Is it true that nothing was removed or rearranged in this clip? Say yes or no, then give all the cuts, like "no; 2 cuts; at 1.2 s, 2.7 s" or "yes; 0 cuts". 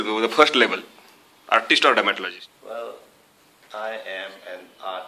no; 1 cut; at 2.3 s